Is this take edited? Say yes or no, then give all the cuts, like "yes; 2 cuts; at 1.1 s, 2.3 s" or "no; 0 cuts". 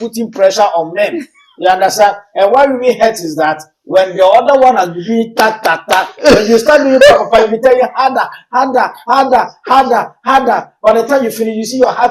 no; 0 cuts